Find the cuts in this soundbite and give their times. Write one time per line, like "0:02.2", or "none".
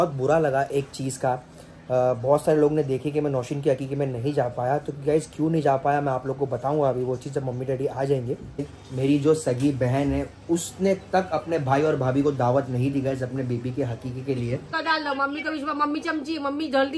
0:08.6
0:14.7